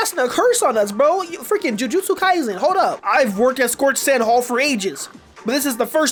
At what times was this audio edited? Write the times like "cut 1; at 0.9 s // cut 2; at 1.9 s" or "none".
none